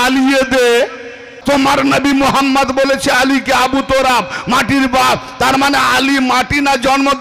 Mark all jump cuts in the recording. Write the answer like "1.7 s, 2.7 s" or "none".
1.3 s